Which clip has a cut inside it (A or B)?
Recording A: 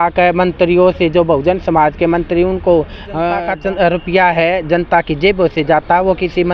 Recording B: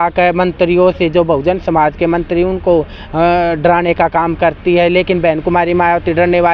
A